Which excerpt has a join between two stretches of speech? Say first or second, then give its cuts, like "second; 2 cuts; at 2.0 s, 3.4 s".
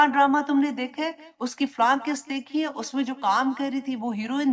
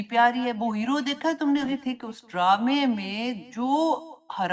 second; 1 cut; at 1.7 s